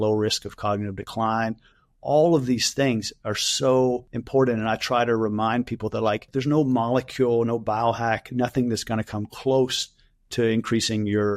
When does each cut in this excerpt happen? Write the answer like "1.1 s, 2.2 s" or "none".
4.1 s, 6.3 s